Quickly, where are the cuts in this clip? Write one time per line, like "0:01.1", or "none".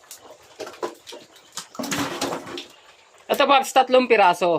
0:03.1